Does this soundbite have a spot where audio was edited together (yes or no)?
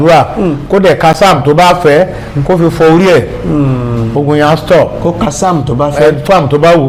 no